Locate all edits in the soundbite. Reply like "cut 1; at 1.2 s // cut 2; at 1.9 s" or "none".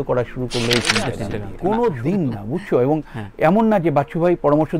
cut 1; at 1.5 s